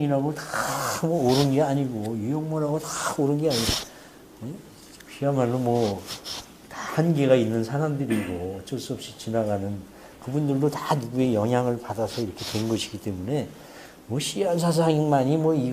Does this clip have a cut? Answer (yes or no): yes